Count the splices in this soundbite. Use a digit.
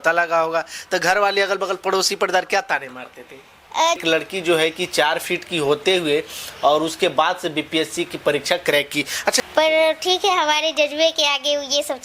2